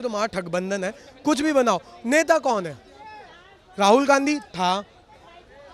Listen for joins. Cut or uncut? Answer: uncut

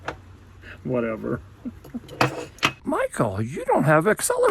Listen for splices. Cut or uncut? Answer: cut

